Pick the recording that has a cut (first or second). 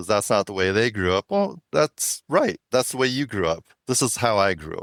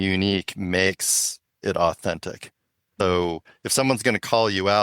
second